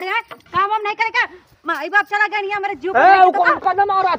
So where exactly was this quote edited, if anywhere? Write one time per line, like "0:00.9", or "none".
none